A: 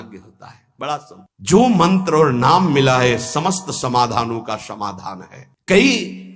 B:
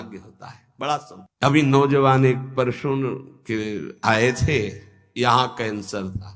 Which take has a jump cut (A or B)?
A